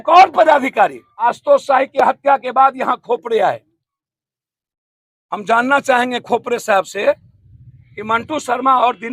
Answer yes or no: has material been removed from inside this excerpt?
yes